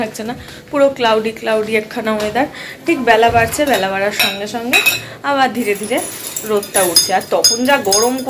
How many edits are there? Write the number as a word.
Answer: zero